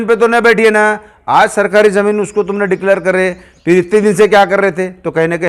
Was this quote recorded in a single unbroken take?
yes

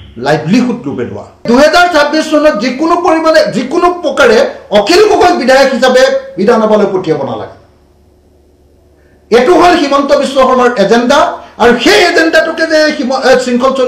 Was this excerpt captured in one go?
no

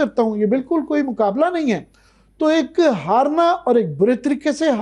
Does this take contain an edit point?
no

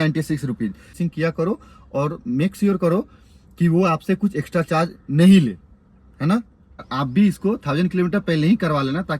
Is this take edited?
yes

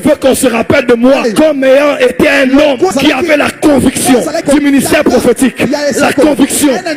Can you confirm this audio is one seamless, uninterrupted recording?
yes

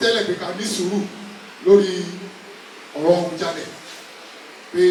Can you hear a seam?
no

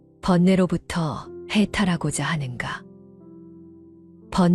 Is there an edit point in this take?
no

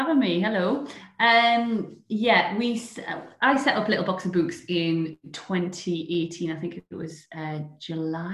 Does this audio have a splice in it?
no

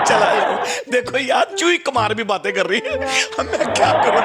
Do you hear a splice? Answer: no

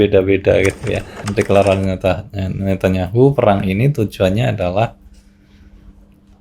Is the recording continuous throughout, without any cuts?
no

